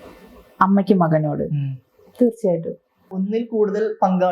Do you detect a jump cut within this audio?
yes; 1 cut; at 3.1 s

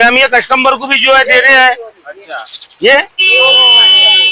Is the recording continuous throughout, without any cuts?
yes; 0 cuts

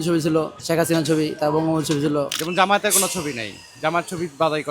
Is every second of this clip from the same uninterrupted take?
no; 1 cut; at 2.3 s

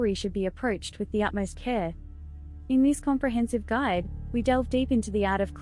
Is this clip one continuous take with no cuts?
yes; 0 cuts

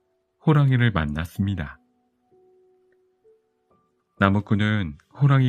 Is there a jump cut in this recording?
yes; 2 cuts; at 1.8 s, 4.2 s

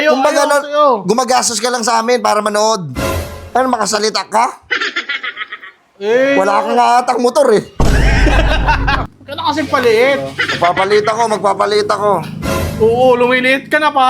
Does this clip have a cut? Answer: yes; 1 cut; at 9.1 s

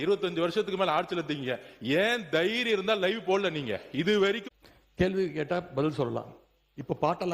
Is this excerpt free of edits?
no; 1 cut; at 4.5 s

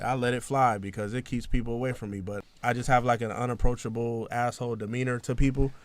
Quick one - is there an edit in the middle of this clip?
yes; 1 cut; at 2.4 s

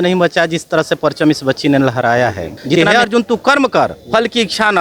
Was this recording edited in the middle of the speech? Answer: yes; 1 cut; at 2.8 s

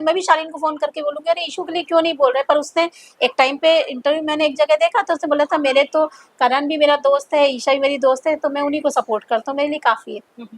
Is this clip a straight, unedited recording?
yes; 0 cuts

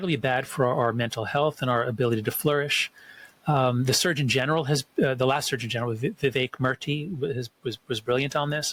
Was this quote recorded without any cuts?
yes; 0 cuts

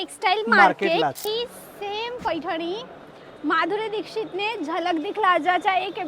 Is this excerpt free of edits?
no; 1 cut; at 1.2 s

